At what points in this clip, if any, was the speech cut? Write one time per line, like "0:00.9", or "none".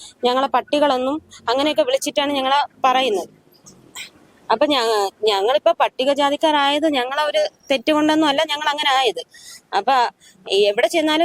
none